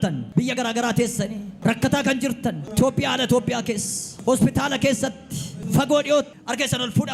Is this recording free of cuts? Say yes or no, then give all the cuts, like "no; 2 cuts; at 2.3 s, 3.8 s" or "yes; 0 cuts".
yes; 0 cuts